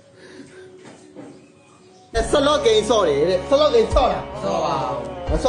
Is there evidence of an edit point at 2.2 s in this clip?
yes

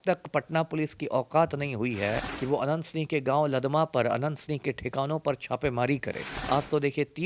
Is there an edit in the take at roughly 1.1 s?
no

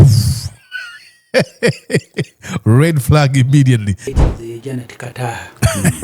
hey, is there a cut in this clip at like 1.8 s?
no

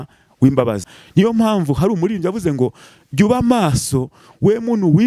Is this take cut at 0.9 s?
yes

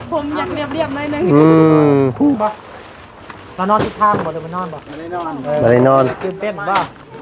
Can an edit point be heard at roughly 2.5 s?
yes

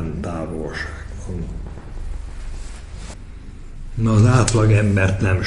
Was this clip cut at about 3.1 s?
yes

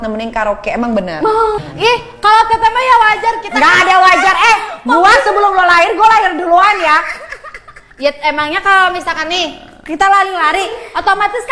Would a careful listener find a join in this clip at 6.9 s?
no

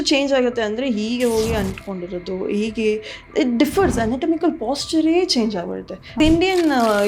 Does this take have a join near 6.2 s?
yes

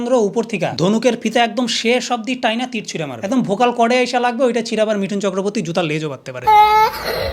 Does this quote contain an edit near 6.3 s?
yes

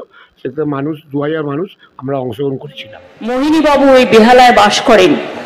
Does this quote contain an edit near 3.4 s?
yes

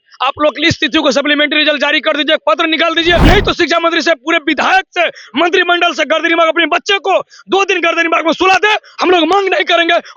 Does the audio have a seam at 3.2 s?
yes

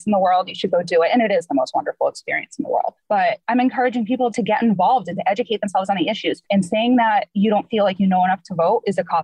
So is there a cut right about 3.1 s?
yes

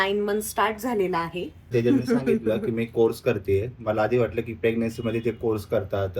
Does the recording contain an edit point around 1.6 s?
yes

